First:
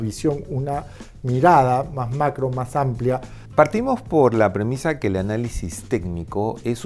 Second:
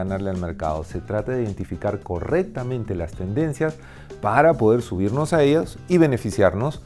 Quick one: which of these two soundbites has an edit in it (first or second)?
first